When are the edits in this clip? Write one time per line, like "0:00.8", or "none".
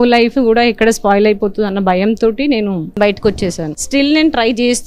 0:02.9
0:03.8